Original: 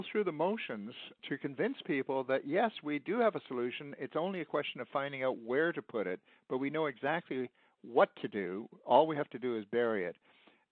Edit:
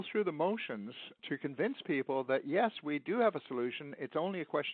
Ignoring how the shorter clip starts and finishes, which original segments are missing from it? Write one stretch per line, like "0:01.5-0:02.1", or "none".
none